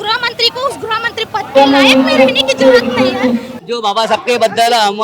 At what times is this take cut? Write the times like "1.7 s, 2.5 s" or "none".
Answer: 3.5 s